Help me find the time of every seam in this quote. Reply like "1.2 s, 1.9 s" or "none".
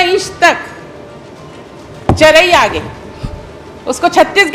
none